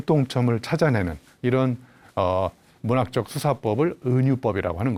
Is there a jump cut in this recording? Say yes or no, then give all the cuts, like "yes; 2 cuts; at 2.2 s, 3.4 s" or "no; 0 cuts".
no; 0 cuts